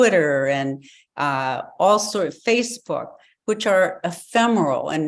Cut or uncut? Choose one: uncut